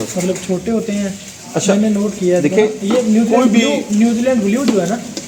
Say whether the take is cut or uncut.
uncut